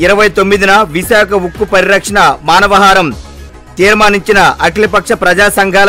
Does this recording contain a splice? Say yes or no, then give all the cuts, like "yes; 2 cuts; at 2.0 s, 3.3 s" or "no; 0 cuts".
no; 0 cuts